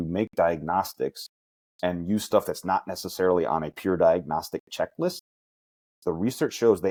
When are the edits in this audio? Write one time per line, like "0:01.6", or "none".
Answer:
none